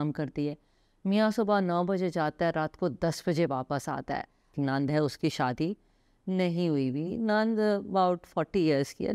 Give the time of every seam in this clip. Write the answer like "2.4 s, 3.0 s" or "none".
4.5 s

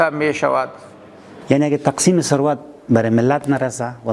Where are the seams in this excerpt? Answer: 1.3 s

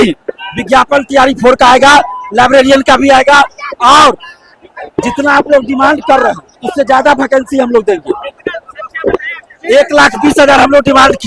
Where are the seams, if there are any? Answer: none

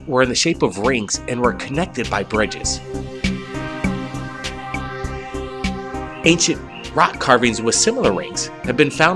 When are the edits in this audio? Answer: 7.8 s

